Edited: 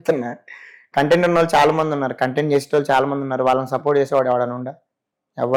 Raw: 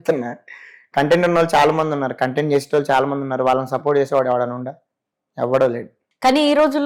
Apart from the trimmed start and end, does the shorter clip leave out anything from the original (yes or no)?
no